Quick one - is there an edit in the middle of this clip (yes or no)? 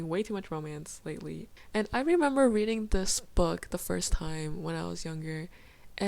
no